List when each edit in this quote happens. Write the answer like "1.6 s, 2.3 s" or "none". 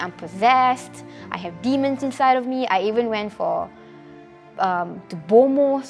none